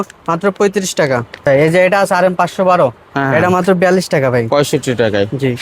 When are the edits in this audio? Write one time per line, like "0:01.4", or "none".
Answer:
0:01.5
0:04.5